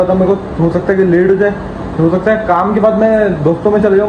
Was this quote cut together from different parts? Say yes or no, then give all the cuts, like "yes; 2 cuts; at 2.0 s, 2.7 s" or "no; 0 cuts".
no; 0 cuts